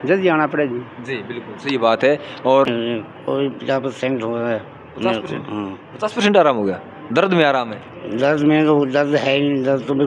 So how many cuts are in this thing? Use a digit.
1